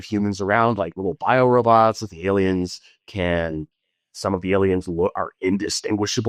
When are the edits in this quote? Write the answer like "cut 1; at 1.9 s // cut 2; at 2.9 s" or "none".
none